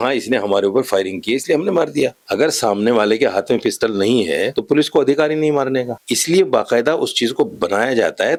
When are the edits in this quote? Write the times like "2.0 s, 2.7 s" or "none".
none